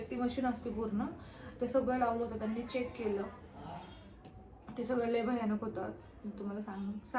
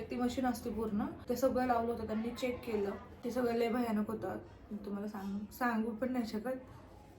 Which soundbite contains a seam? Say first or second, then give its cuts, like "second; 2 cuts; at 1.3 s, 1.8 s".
second; 2 cuts; at 1.2 s, 3.1 s